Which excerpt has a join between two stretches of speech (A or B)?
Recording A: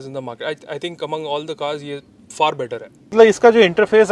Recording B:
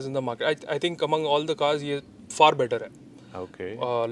A